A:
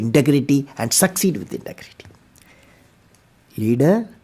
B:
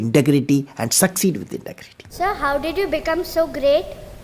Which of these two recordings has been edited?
B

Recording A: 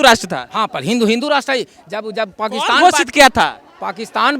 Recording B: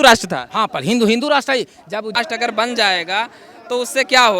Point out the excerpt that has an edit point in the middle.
B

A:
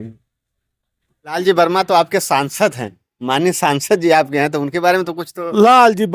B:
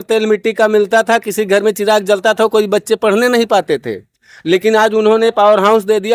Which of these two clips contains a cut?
A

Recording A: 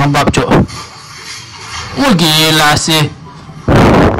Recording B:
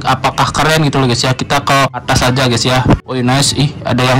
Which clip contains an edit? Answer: B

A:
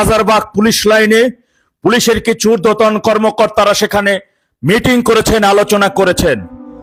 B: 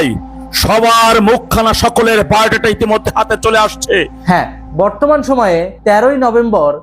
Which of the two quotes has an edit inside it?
B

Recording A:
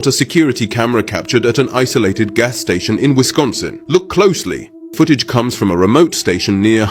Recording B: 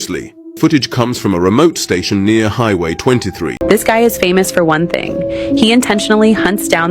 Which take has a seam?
B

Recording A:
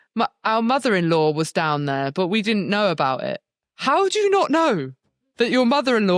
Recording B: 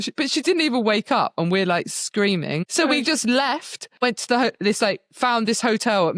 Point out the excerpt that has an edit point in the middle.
B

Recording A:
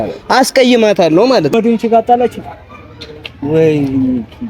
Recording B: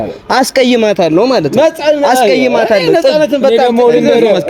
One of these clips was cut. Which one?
A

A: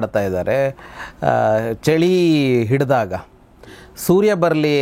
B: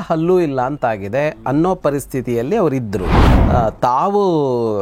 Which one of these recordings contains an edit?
B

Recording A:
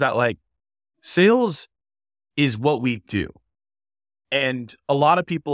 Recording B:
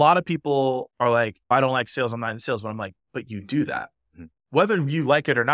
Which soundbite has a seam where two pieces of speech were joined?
B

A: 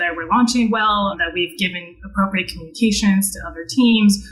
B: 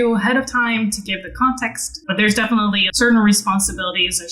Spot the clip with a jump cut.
B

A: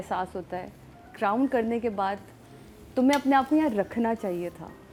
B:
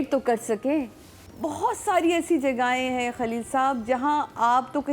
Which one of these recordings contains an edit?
B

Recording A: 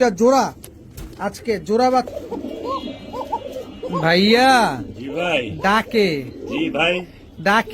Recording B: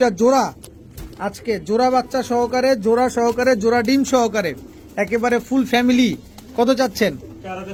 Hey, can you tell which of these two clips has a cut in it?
A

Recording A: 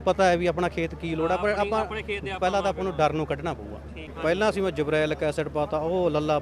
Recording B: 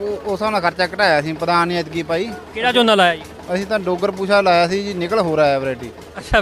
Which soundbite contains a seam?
A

